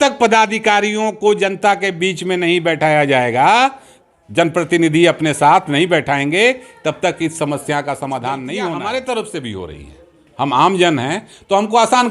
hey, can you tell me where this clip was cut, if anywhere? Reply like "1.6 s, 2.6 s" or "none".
8.7 s